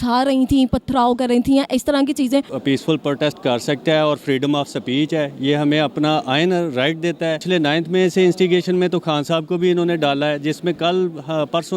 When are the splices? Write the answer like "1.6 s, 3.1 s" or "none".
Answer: 2.5 s, 7.4 s